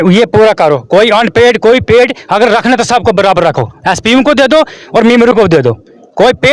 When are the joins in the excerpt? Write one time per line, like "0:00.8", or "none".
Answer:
none